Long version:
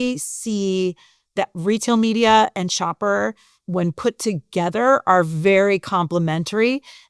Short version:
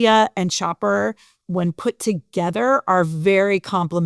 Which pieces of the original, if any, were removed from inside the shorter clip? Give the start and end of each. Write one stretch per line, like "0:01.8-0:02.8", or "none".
none